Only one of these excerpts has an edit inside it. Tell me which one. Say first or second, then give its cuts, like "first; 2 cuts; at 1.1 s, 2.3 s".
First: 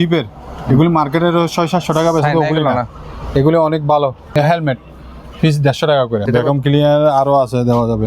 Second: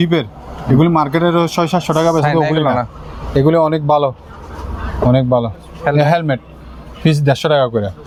first; 2 cuts; at 4.3 s, 6.2 s